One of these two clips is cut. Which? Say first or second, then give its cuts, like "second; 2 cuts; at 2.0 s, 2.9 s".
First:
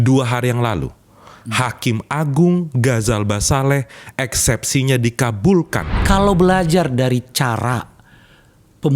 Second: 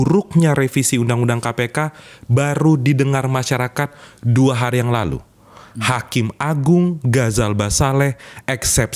first; 1 cut; at 6.0 s